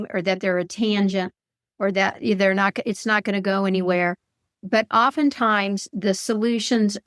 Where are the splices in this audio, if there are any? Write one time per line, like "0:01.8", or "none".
none